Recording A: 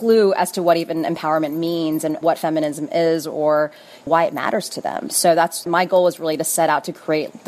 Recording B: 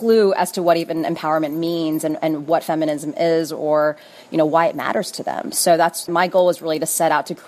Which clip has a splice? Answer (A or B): A